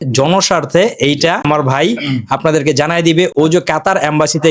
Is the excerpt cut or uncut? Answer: cut